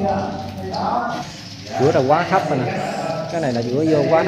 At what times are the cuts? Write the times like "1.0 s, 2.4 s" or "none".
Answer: 1.2 s